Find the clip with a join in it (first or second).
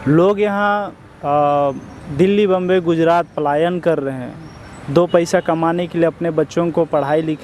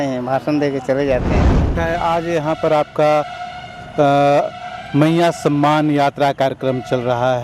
second